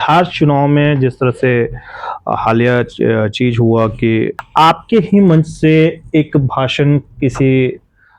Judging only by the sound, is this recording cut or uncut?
cut